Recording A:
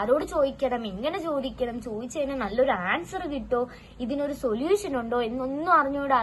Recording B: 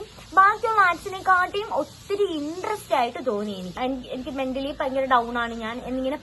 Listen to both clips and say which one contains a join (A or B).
B